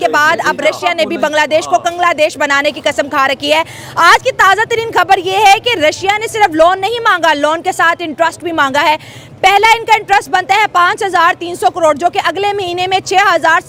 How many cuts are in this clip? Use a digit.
0